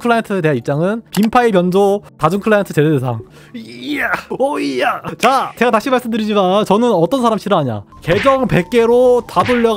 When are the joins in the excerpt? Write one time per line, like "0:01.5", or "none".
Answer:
0:01.0
0:05.5